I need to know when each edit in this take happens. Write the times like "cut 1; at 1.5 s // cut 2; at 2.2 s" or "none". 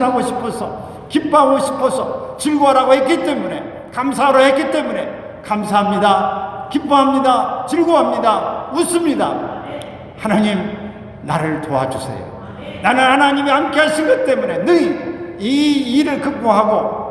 none